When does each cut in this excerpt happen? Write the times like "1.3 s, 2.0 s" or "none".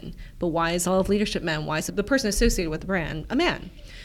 1.9 s